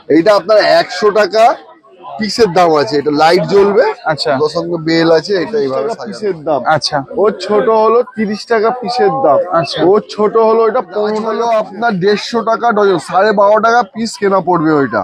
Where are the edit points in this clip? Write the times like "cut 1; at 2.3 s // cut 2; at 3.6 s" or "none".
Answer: cut 1; at 6.0 s // cut 2; at 11.2 s